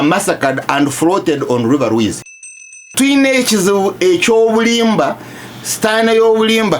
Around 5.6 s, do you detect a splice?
no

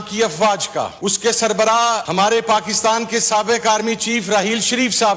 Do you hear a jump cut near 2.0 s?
yes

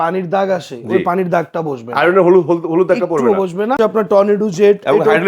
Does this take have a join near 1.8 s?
no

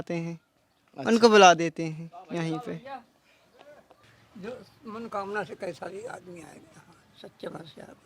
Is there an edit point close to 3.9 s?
yes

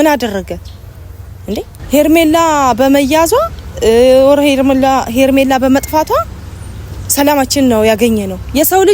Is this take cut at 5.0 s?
no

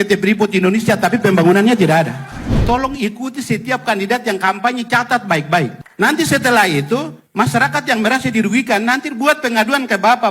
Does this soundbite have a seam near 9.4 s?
no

